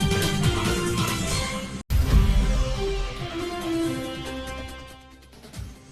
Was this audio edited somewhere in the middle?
yes; 1 cut; at 1.9 s

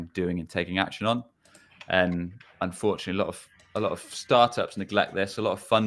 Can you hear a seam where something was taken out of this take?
no; 0 cuts

